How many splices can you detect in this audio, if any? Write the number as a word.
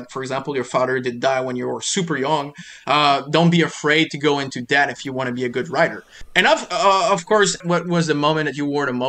two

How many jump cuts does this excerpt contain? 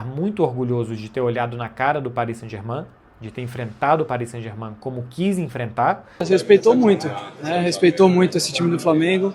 one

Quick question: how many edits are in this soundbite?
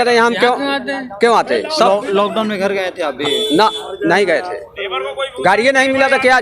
zero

